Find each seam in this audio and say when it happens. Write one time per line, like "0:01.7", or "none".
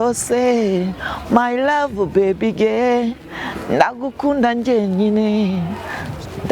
none